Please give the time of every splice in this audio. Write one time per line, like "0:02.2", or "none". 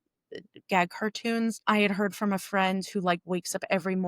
0:01.6